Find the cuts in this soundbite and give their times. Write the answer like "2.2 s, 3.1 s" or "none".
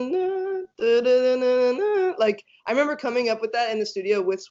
none

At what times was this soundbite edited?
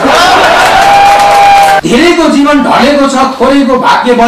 1.8 s

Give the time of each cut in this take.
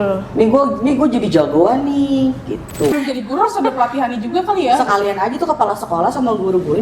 2.9 s

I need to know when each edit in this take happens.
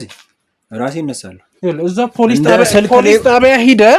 none

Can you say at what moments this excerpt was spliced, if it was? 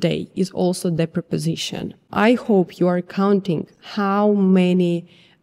2.0 s

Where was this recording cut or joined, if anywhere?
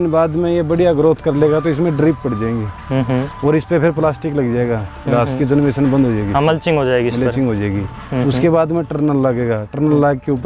none

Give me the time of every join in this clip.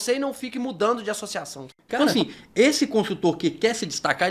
1.8 s

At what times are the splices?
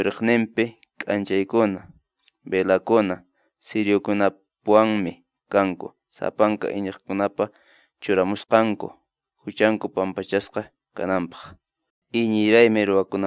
11.9 s

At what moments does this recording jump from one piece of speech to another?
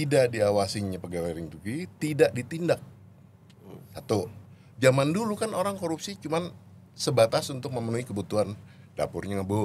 none

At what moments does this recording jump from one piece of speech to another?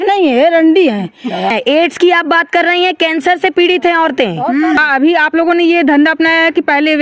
1.5 s, 4.8 s

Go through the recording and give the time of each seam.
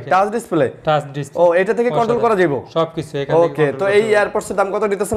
none

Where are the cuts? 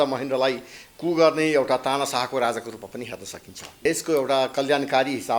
3.8 s

